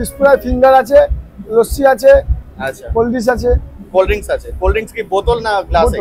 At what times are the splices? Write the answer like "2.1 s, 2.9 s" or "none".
none